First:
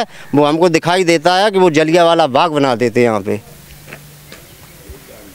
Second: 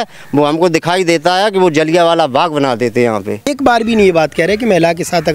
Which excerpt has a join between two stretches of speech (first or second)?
second